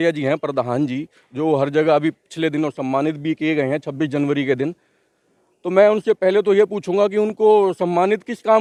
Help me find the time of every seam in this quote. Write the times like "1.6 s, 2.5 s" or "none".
none